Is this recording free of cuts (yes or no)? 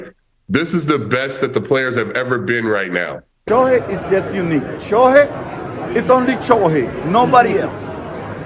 no